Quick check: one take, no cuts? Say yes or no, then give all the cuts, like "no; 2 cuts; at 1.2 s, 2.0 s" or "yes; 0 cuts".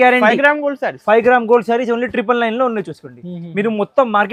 yes; 0 cuts